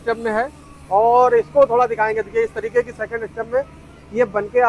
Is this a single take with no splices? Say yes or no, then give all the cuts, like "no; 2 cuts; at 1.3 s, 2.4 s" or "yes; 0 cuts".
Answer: yes; 0 cuts